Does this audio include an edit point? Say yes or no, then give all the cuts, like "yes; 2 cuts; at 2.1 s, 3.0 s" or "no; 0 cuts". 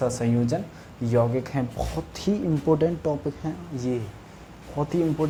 no; 0 cuts